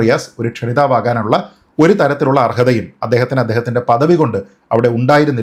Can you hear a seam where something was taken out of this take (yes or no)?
no